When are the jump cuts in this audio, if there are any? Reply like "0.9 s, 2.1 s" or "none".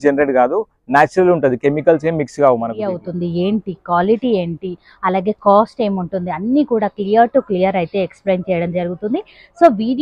3.0 s